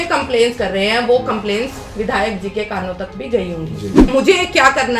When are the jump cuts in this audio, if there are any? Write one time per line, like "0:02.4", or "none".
0:04.1